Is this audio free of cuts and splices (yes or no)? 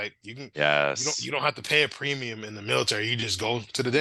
yes